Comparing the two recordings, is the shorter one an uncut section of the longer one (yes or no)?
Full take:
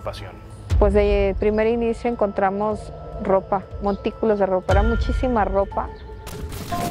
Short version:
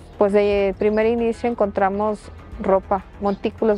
yes